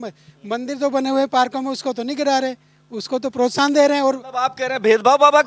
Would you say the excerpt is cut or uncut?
uncut